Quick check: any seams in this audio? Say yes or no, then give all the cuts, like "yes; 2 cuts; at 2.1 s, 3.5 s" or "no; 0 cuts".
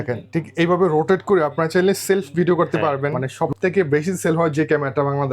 yes; 1 cut; at 3.2 s